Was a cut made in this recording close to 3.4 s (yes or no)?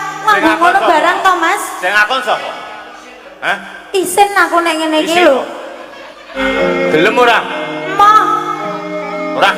no